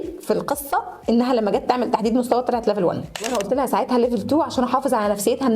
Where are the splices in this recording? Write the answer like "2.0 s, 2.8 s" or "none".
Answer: 3.3 s